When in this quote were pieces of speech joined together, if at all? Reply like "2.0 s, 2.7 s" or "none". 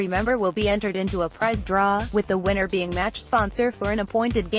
none